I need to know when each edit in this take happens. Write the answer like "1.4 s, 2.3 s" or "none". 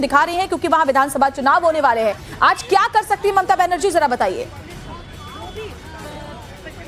none